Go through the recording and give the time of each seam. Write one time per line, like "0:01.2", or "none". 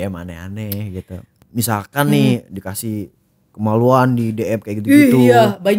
0:01.4